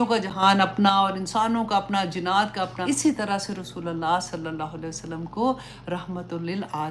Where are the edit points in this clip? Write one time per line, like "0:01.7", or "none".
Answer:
0:02.8